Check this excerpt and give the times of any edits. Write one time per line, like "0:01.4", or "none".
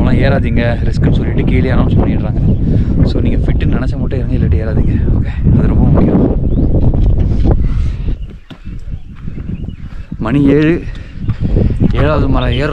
0:08.2

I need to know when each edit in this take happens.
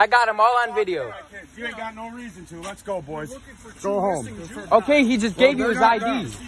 none

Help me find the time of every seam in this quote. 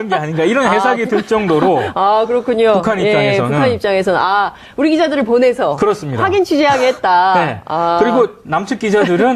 0:06.8

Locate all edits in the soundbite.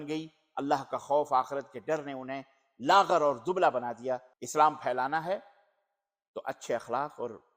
0:04.4

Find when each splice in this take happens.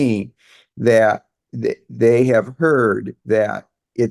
0:03.1

